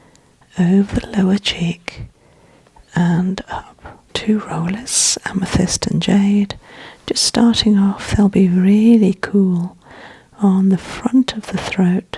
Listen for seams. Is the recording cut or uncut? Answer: cut